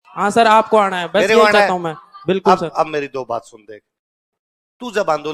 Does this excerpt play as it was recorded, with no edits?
no; 1 cut; at 4.2 s

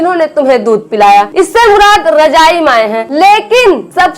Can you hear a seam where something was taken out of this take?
yes; 2 cuts; at 1.3 s, 3.0 s

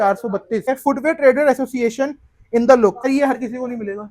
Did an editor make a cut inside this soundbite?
yes; 2 cuts; at 0.7 s, 3.0 s

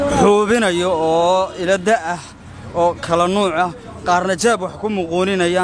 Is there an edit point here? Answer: no; 0 cuts

